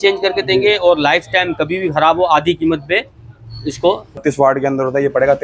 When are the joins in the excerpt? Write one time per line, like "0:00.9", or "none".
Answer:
0:04.2